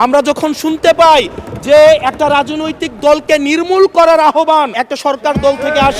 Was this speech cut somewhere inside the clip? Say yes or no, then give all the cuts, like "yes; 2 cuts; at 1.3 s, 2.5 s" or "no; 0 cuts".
yes; 1 cut; at 4.7 s